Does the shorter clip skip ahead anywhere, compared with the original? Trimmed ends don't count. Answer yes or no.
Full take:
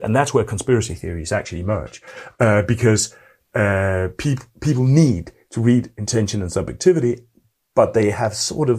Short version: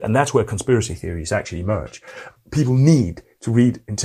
yes